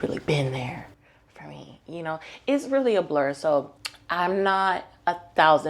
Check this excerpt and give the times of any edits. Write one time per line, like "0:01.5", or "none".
none

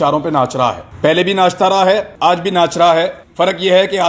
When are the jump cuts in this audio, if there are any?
0:00.9
0:02.1
0:03.2

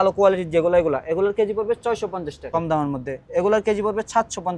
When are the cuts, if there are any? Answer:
0:02.4

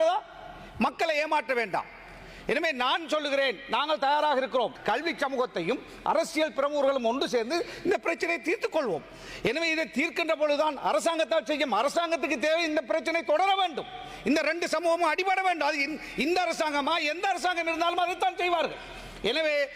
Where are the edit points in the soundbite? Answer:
0:04.8

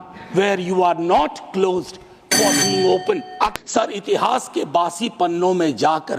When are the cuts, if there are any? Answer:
0:03.6

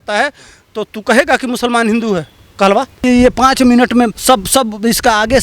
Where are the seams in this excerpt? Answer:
0:03.0
0:04.2

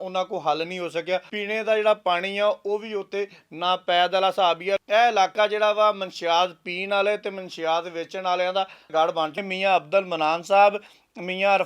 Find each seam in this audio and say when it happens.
0:01.3
0:04.8
0:09.4

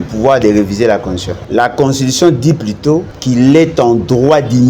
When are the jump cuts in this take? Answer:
0:01.3
0:03.1

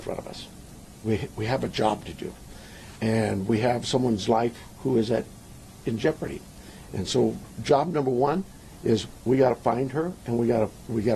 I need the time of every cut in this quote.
none

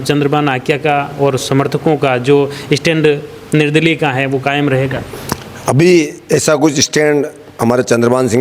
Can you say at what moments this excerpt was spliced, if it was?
none

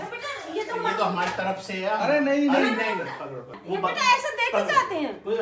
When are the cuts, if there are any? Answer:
0:03.6

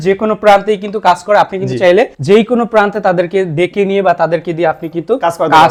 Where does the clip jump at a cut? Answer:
none

